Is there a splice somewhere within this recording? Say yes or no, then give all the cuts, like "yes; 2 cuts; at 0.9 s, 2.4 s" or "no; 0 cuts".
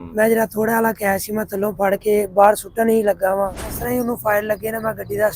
yes; 1 cut; at 3.7 s